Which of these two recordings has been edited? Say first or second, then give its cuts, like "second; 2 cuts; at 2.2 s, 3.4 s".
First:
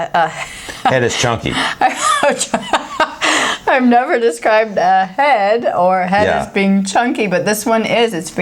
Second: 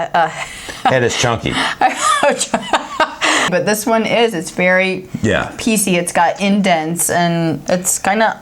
second; 1 cut; at 3.5 s